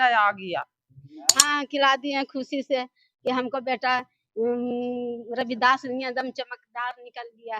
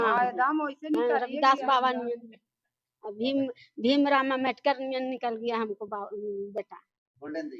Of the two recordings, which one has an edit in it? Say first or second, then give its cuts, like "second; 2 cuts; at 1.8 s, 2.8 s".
first; 1 cut; at 1.4 s